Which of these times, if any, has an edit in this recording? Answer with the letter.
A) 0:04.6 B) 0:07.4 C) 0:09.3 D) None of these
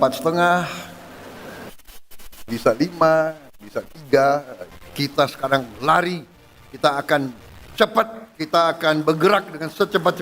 A